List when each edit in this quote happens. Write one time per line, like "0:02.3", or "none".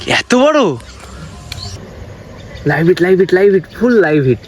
0:01.8